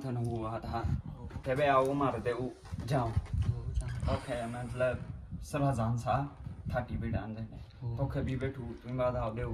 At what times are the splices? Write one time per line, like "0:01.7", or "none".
0:01.3